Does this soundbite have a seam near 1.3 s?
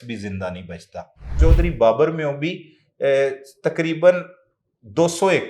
yes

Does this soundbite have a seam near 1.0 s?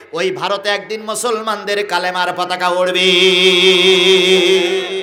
no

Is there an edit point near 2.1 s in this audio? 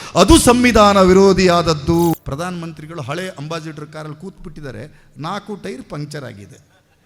yes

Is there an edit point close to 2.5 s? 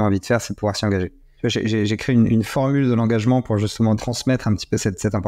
no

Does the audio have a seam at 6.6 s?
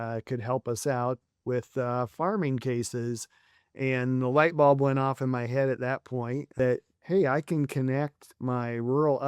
yes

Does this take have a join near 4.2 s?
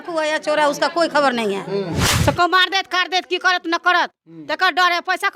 no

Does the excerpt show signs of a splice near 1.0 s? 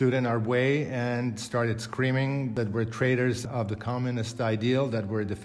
no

